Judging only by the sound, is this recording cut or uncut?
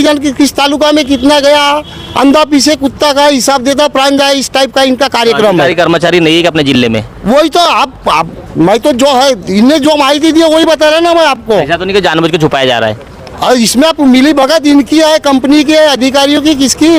uncut